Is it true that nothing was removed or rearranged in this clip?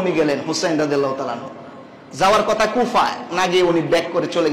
yes; 0 cuts

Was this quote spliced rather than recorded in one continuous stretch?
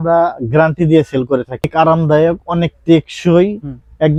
no; 0 cuts

